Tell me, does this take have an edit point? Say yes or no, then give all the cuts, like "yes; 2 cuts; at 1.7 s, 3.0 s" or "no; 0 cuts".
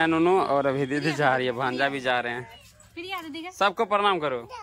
no; 0 cuts